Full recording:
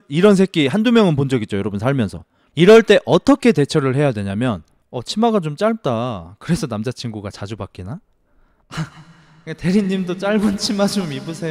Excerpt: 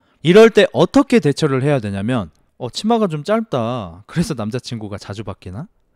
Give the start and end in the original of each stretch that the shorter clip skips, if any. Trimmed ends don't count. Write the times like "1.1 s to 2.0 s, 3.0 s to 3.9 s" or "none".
none